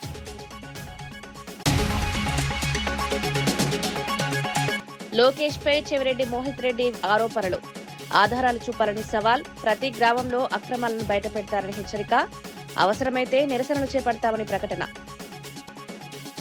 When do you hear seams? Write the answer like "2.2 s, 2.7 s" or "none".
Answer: 1.6 s, 3.0 s, 4.3 s